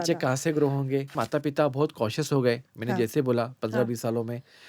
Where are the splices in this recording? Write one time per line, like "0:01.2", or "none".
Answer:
0:01.1